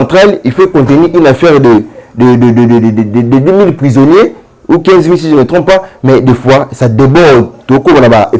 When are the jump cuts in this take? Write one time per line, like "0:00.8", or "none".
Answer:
none

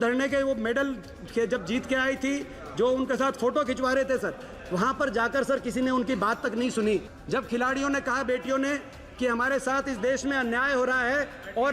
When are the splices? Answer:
0:07.1

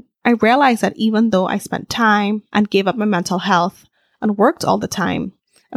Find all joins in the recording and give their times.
none

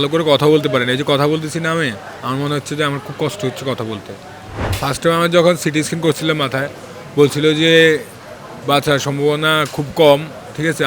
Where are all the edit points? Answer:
0:04.5

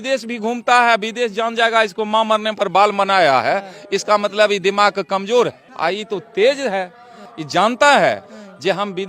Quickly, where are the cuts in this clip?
none

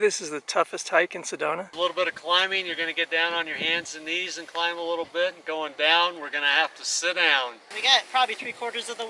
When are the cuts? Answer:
0:01.7
0:07.7

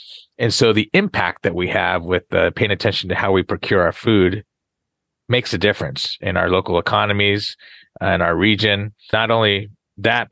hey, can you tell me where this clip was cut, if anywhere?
0:09.1

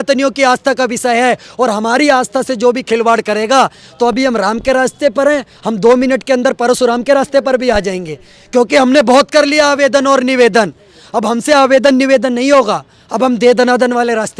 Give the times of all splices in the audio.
none

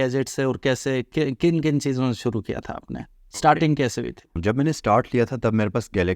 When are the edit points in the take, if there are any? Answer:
0:04.3

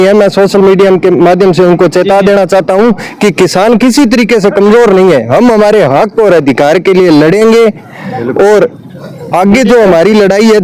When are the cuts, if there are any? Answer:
none

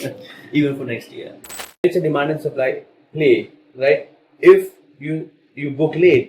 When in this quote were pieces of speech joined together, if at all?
0:01.8

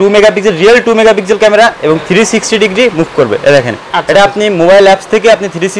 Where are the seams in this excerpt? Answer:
none

